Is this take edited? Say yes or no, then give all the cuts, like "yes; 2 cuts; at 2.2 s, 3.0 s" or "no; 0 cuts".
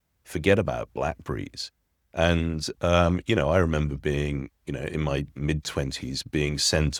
no; 0 cuts